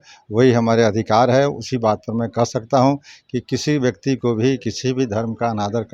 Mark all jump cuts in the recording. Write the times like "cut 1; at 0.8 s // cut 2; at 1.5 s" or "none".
none